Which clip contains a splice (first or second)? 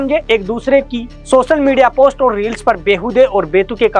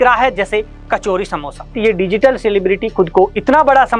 second